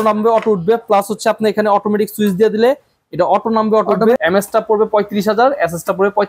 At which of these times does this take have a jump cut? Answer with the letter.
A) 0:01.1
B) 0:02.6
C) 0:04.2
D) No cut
C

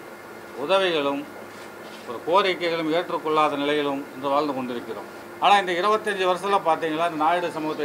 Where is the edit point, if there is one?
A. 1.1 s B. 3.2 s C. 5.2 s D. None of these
C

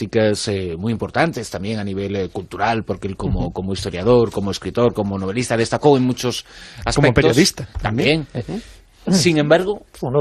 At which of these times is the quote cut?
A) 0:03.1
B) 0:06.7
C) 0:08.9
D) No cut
C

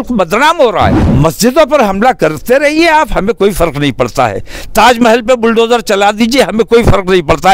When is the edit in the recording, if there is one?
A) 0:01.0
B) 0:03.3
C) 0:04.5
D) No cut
A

